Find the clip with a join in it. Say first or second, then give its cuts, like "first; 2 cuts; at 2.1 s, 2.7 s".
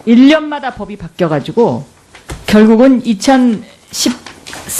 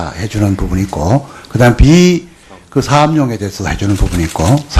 second; 1 cut; at 3.3 s